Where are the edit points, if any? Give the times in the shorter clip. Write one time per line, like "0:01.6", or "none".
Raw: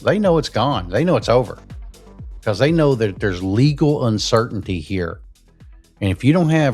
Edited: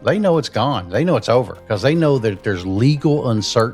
0:01.6

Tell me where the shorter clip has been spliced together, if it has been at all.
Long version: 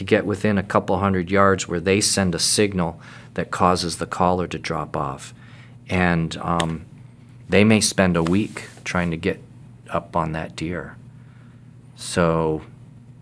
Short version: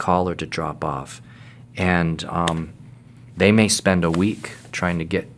none

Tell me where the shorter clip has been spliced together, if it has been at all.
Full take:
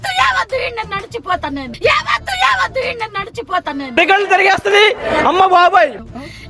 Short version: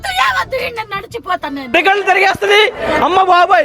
0:01.6

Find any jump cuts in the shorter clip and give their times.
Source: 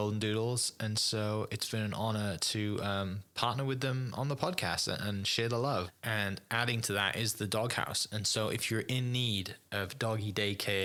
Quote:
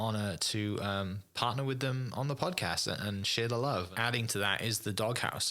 0:03.9

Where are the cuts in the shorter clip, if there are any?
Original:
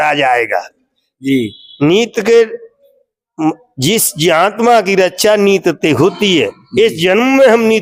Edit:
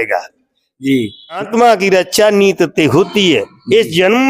0:01.4

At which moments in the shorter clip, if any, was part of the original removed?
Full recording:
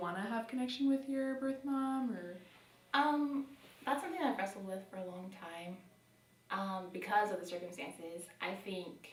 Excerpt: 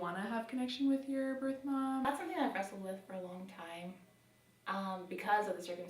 0:02.0

